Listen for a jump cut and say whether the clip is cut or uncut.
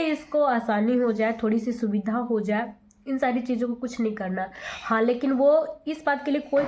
uncut